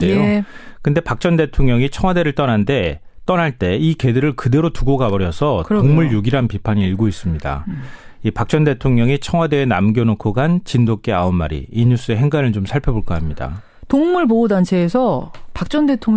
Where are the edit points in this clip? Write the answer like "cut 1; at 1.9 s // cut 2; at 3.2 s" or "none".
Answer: none